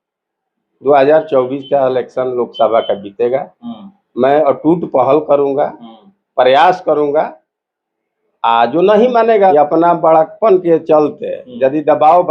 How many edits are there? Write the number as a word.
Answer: one